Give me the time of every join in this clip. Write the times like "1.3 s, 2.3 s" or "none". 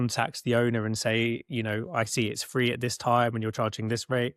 none